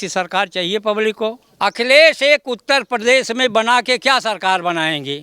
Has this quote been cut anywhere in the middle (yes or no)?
yes